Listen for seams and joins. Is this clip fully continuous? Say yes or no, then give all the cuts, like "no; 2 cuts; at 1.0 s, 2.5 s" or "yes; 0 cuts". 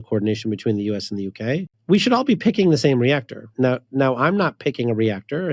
no; 2 cuts; at 1.7 s, 3.5 s